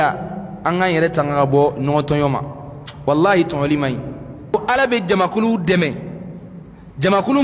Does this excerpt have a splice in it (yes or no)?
yes